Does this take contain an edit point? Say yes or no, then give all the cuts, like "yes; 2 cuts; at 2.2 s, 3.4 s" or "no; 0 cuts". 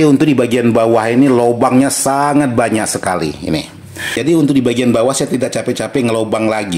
yes; 1 cut; at 4.2 s